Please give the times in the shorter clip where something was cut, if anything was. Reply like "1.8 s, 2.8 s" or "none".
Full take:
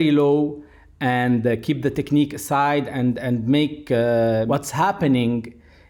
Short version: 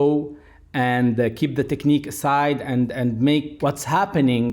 3.6 s